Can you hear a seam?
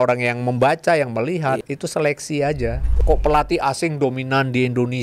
yes; 2 cuts; at 1.6 s, 2.9 s

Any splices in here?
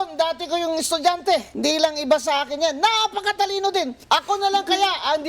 yes; 2 cuts; at 1.5 s, 4.0 s

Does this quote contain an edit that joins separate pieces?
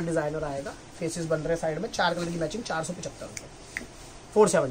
no; 0 cuts

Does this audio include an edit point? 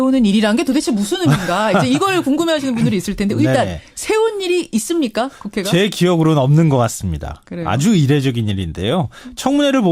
yes; 1 cut; at 4.2 s

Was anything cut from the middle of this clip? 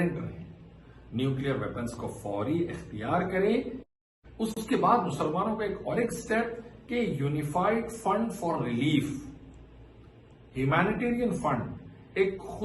yes; 1 cut; at 3.8 s

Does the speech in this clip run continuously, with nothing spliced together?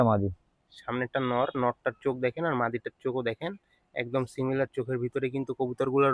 yes; 0 cuts

